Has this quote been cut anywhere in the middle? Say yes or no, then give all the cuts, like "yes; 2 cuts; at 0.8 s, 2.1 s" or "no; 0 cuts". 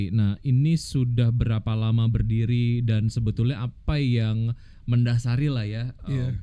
no; 0 cuts